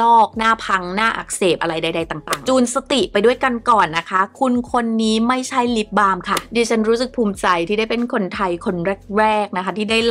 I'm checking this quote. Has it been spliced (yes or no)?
yes